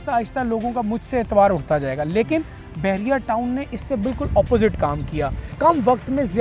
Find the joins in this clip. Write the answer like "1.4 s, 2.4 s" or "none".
5.4 s